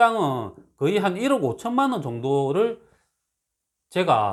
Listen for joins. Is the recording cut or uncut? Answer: uncut